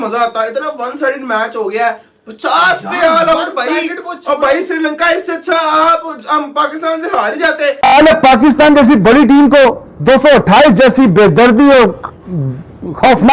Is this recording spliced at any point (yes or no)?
yes